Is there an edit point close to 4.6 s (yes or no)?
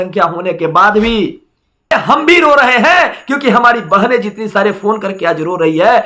no